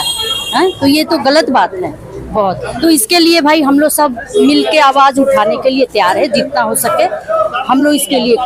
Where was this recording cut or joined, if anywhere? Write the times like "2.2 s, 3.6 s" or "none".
none